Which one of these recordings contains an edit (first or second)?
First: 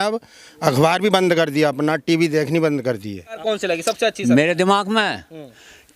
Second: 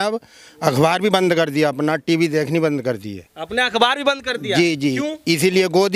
first